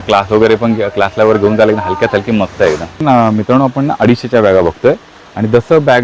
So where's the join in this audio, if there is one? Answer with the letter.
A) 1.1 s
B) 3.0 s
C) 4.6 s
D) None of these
B